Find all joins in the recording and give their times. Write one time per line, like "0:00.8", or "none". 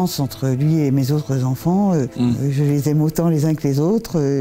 0:02.1